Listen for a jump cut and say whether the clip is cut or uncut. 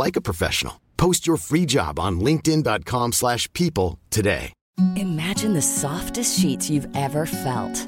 cut